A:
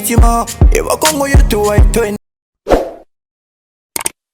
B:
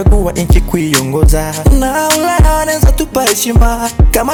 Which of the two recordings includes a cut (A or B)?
A